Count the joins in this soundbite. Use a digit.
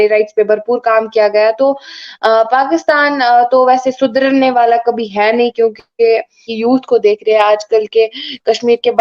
1